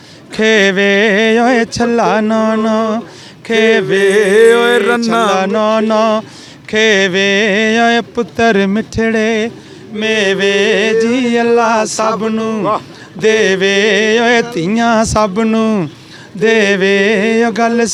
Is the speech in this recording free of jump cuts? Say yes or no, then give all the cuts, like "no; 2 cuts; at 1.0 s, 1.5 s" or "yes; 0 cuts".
yes; 0 cuts